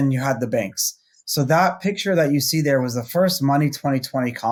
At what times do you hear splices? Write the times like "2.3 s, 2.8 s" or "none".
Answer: none